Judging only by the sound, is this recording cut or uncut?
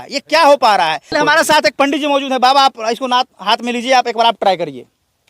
cut